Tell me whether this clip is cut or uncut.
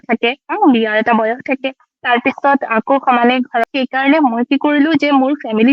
cut